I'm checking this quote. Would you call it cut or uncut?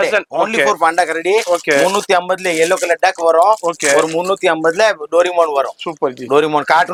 uncut